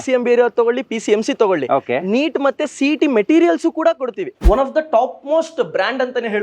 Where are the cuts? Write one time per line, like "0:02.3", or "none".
0:04.3